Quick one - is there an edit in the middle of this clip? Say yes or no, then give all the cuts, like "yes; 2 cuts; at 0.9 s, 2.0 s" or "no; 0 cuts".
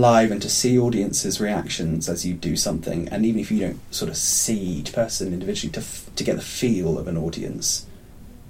no; 0 cuts